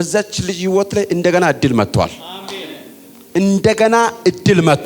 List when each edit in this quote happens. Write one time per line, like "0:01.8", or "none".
none